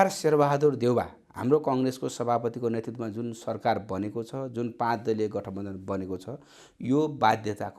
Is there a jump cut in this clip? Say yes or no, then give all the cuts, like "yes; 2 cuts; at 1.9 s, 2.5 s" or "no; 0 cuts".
no; 0 cuts